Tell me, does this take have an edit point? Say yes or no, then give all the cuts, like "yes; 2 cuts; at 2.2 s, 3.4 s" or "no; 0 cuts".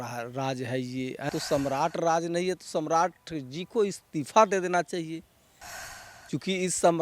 yes; 1 cut; at 1.3 s